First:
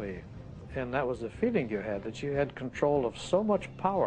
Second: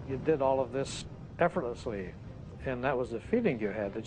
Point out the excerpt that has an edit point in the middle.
second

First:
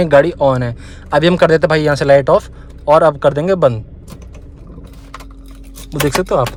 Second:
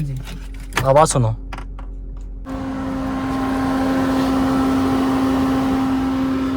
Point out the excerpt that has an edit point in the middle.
second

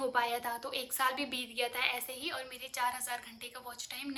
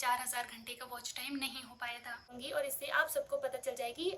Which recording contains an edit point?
second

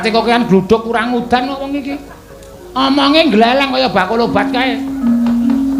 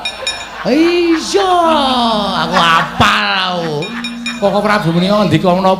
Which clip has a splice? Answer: second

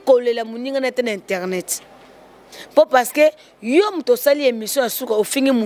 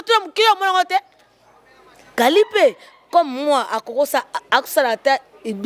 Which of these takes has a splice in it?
second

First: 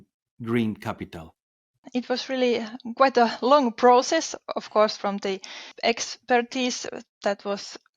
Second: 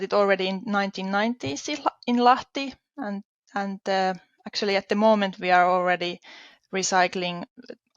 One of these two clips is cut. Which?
first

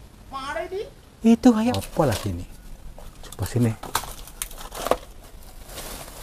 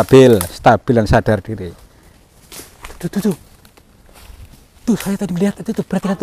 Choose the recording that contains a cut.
first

